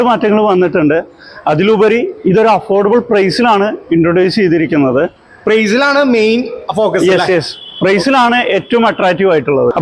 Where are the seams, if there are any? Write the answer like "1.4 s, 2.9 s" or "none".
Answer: none